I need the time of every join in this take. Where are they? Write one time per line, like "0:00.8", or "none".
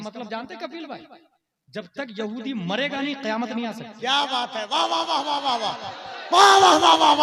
none